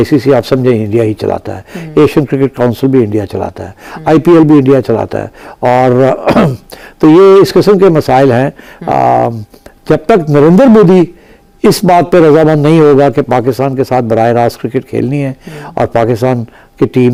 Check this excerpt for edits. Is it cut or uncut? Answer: uncut